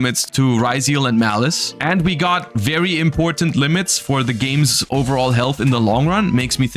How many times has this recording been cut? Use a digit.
0